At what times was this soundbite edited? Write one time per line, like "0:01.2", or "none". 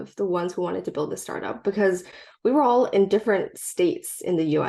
none